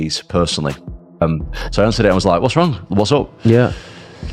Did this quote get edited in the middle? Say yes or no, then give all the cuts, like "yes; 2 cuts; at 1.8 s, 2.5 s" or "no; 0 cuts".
yes; 1 cut; at 1.2 s